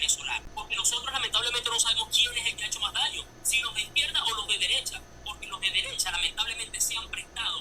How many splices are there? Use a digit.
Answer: 0